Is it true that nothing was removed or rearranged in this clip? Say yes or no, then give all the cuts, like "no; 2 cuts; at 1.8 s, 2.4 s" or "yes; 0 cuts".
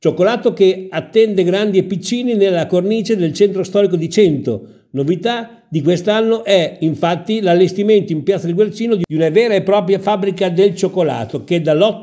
no; 1 cut; at 9.1 s